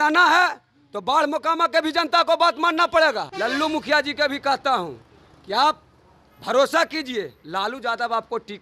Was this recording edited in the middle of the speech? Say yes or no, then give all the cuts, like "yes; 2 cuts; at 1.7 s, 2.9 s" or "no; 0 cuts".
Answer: yes; 1 cut; at 3.3 s